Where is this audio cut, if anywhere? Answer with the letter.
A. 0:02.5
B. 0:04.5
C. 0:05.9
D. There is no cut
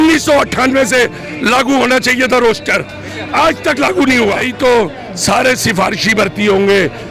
B